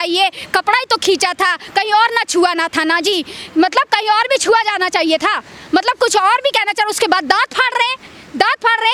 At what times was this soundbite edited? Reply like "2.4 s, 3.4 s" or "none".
none